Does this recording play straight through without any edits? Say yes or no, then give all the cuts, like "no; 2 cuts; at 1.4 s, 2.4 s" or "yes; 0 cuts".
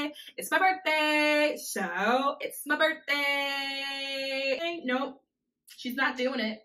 no; 1 cut; at 4.6 s